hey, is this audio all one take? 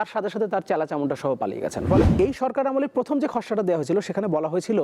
no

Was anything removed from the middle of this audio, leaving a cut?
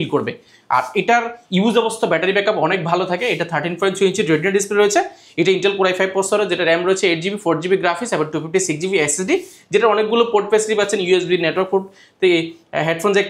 no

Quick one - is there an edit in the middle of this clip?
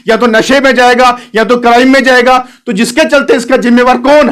no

